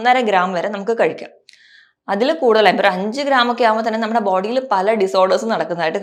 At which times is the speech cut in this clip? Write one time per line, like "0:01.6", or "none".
none